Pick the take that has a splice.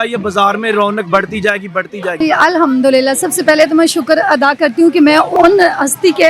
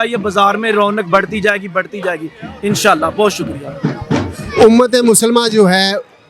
first; 2 cuts; at 2.2 s, 5.4 s

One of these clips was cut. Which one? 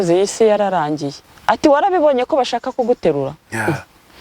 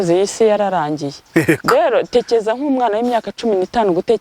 first; 1 cut; at 1.1 s

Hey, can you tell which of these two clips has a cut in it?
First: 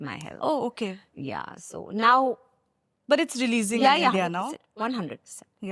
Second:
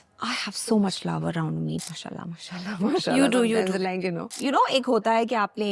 second; 2 cuts; at 1.8 s, 4.2 s

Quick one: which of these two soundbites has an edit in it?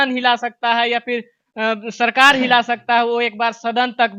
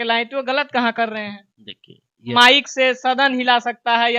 second; 1 cut; at 2.3 s

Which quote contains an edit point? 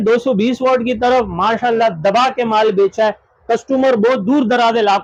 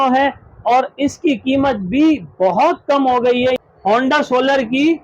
second; 1 cut; at 3.6 s

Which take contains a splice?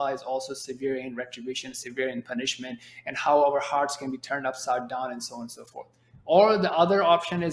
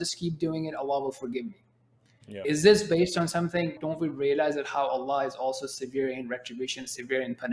second; 2 cuts; at 2.4 s, 3.8 s

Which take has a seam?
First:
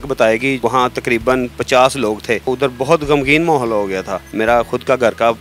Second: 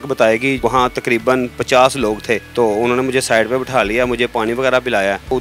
first; 2 cuts; at 2.4 s, 4.2 s

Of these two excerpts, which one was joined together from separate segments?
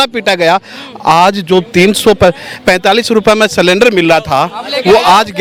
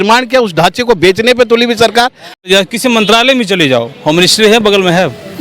second; 1 cut; at 2.4 s

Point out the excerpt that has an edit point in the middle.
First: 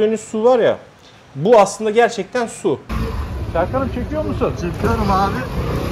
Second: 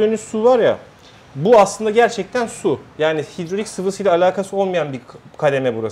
first; 1 cut; at 2.9 s

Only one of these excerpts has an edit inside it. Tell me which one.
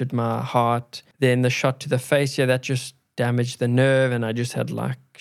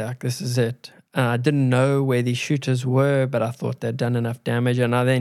first; 1 cut; at 1.0 s

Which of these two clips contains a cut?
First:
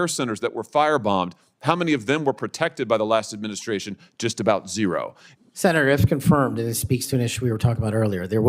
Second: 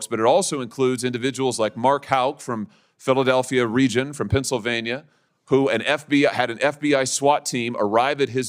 first; 1 cut; at 5.2 s

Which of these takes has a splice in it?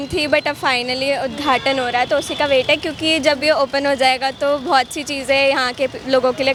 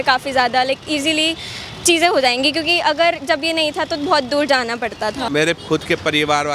second; 1 cut; at 5.3 s

